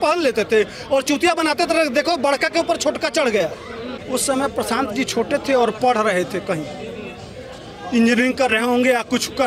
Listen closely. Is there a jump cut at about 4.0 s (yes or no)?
yes